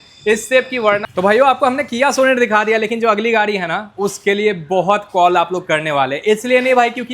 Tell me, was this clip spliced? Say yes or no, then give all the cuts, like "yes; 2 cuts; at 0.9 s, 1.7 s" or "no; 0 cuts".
yes; 1 cut; at 1.1 s